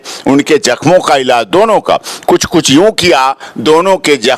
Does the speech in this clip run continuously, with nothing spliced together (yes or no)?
yes